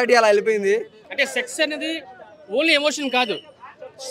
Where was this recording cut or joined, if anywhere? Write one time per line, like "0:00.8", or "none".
0:01.0

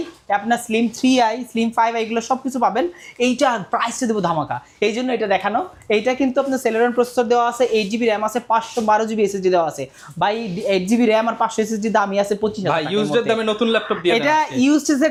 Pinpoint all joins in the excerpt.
none

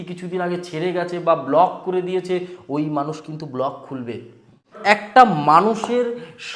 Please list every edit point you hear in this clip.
0:05.1

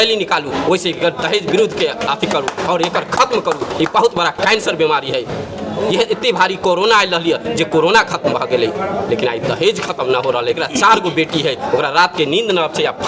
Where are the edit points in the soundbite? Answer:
0:10.6

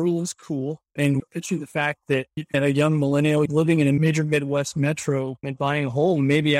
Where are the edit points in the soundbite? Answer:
0:00.9
0:02.5

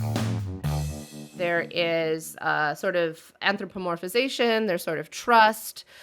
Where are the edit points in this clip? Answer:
0:01.3

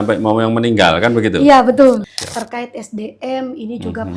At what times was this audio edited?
0:02.0

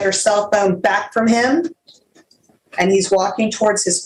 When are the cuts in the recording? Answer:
none

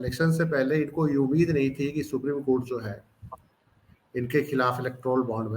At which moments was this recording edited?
none

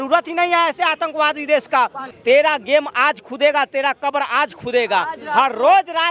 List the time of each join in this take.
0:02.1

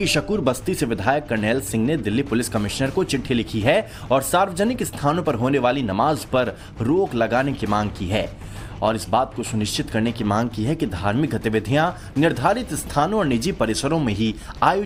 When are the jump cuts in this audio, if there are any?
none

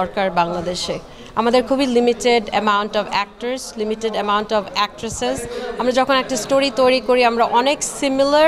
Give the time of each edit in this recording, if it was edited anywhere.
none

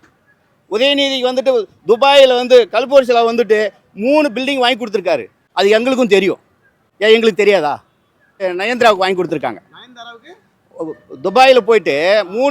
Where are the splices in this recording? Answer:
0:05.4
0:08.4

